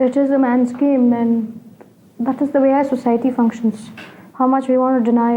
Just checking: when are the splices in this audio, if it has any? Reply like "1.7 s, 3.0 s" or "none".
none